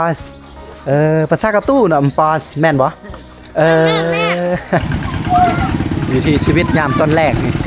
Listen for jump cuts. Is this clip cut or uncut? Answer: cut